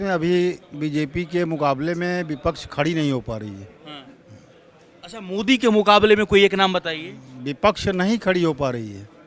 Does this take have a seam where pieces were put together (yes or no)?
no